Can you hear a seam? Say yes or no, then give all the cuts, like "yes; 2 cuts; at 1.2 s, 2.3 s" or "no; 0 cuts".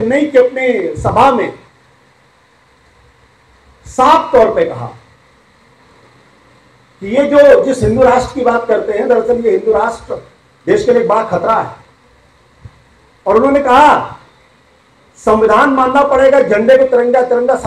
no; 0 cuts